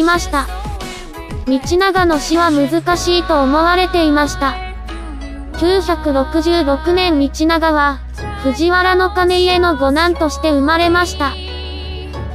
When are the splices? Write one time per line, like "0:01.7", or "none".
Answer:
none

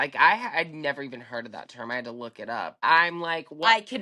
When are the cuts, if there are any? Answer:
0:02.8

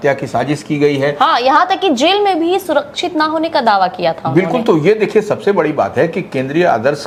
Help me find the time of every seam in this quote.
none

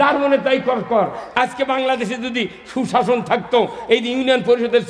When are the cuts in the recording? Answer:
none

